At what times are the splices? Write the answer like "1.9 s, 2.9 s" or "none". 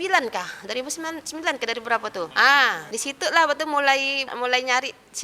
2.3 s, 2.8 s, 4.2 s